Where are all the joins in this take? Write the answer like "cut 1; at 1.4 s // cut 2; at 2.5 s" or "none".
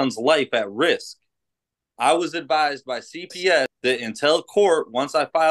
cut 1; at 3.7 s